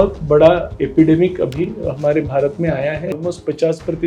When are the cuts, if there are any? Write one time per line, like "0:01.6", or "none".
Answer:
0:03.1